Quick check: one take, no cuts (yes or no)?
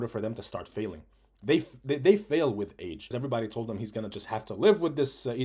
no